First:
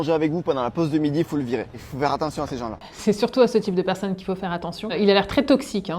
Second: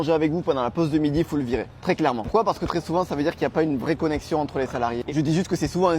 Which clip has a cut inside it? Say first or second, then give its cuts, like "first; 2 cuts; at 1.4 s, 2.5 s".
first; 2 cuts; at 1.8 s, 2.9 s